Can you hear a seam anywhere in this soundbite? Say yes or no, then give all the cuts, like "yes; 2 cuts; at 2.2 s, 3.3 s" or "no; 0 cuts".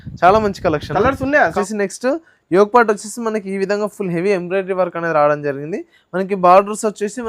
yes; 1 cut; at 1.5 s